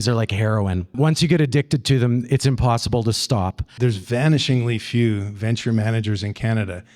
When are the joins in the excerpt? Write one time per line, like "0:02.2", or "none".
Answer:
0:00.9
0:03.7